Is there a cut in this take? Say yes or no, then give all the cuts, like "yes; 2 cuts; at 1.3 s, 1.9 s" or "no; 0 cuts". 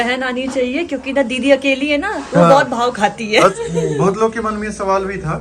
yes; 1 cut; at 3.5 s